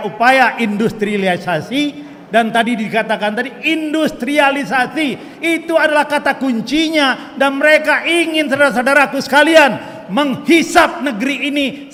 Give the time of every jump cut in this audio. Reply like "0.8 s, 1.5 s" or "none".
none